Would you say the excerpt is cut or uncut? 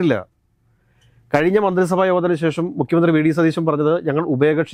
uncut